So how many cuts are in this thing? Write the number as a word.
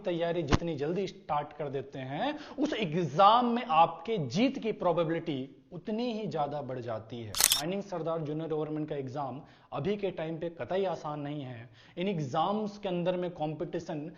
one